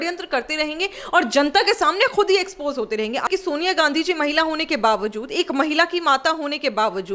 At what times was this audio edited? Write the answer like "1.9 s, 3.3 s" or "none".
3.2 s